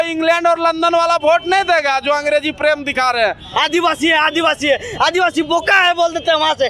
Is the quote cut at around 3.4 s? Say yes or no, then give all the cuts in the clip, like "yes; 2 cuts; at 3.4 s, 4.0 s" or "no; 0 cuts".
yes; 1 cut; at 3.4 s